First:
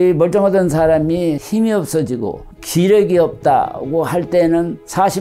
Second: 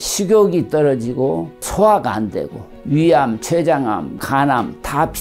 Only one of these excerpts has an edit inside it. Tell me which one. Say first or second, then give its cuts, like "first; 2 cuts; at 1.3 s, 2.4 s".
second; 3 cuts; at 1.6 s, 2.7 s, 4.2 s